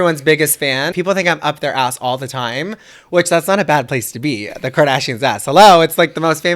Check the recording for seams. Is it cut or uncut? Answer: cut